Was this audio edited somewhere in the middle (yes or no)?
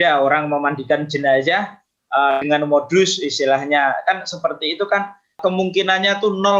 yes